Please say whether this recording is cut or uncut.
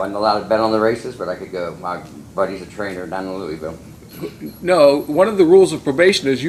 uncut